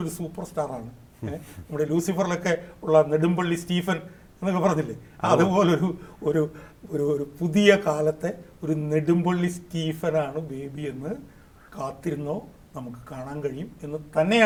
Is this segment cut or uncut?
uncut